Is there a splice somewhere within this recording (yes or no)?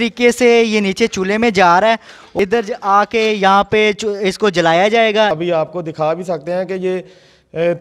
yes